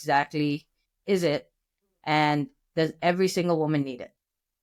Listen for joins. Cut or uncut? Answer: uncut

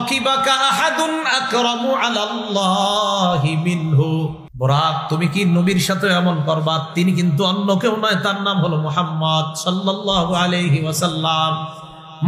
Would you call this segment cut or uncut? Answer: cut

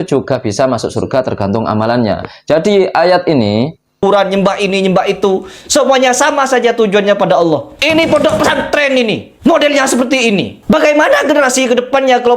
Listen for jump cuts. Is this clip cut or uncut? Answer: cut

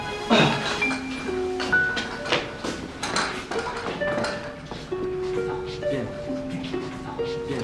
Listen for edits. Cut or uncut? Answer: uncut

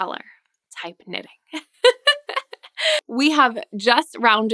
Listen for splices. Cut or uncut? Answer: cut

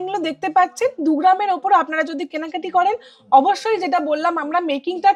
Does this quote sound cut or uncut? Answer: uncut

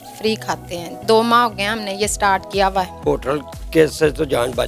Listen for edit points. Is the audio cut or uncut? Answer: cut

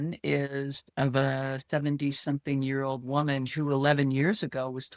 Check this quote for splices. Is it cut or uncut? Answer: uncut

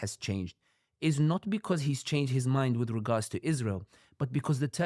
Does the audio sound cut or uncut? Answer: uncut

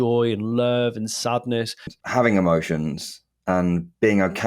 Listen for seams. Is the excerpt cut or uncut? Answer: cut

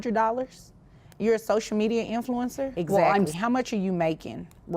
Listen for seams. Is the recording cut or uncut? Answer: cut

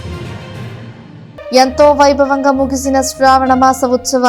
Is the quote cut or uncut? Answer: uncut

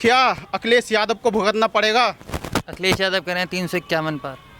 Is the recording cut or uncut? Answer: uncut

